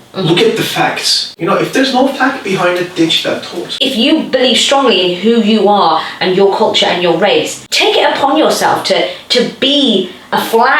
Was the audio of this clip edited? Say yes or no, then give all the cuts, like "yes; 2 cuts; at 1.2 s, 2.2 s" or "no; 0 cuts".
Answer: yes; 3 cuts; at 1.3 s, 3.8 s, 7.6 s